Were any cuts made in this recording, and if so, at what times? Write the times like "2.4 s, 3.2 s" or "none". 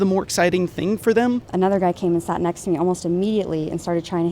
1.5 s